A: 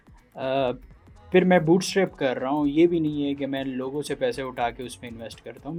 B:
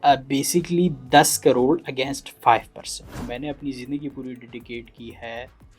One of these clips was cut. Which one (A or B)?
B